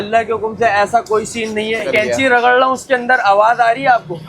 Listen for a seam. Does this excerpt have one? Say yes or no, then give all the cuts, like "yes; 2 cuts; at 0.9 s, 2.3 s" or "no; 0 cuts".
yes; 1 cut; at 1.9 s